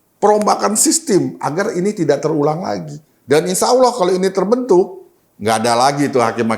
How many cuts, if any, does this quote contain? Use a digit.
1